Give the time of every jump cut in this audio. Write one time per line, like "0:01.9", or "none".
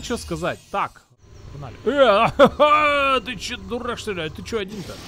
0:01.0